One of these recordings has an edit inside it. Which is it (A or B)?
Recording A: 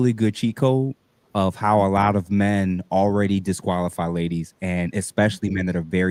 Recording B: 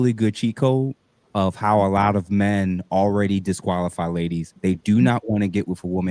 B